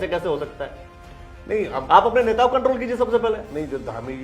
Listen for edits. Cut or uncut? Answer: uncut